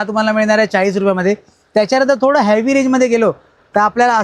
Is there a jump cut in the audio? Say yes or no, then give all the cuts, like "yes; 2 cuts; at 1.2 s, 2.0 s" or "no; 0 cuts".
no; 0 cuts